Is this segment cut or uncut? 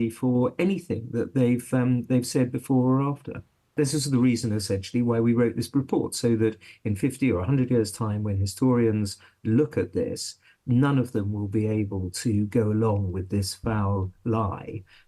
cut